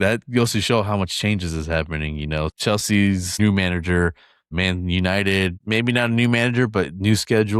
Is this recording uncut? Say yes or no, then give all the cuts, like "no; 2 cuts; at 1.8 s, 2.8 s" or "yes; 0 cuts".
no; 4 cuts; at 2.5 s, 3.3 s, 4.5 s, 5.6 s